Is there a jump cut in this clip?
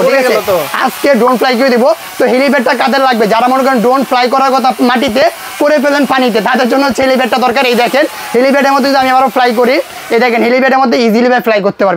no; 0 cuts

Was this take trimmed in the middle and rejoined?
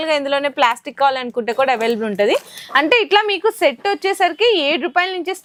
no; 0 cuts

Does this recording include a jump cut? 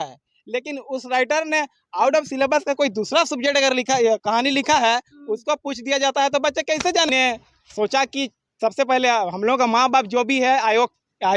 yes; 1 cut; at 7.1 s

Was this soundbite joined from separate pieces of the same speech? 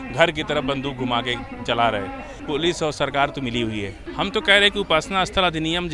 yes; 2 cuts; at 2.3 s, 4.0 s

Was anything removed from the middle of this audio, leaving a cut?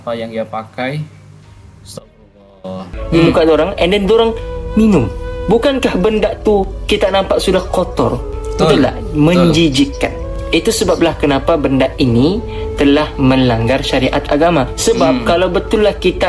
yes; 1 cut; at 2.9 s

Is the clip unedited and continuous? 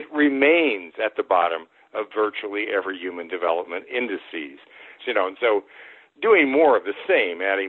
no; 1 cut; at 4.9 s

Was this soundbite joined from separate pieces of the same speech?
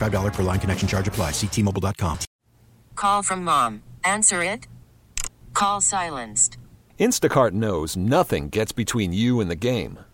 yes; 1 cut; at 2.3 s

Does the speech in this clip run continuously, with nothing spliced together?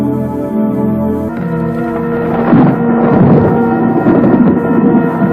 yes; 0 cuts

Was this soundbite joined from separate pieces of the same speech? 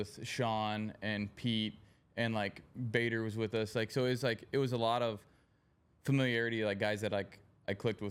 no; 0 cuts

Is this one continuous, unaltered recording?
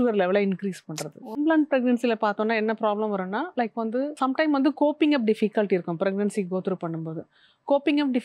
no; 1 cut; at 1.4 s

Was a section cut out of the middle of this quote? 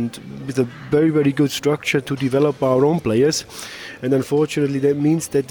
no; 0 cuts

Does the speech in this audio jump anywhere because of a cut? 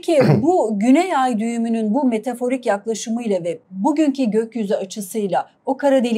no; 0 cuts

